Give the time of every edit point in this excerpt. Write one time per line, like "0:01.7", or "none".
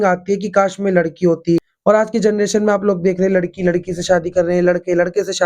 0:01.7